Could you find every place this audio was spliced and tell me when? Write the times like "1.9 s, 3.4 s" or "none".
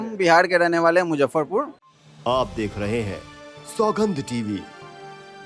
1.8 s